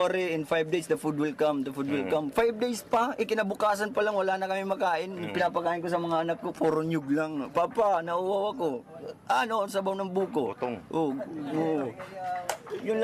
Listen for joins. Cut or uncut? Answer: cut